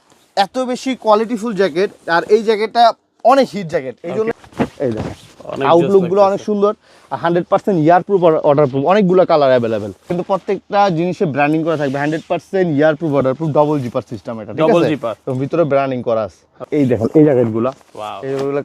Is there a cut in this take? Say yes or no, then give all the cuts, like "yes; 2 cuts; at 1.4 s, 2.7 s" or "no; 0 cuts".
yes; 3 cuts; at 4.3 s, 10.2 s, 16.5 s